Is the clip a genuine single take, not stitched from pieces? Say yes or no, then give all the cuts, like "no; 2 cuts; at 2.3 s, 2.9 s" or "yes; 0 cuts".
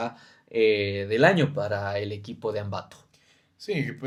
yes; 0 cuts